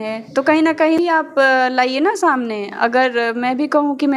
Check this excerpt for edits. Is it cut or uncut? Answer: cut